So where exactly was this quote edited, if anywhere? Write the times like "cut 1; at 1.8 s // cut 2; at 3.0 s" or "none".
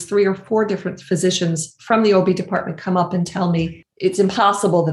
cut 1; at 3.8 s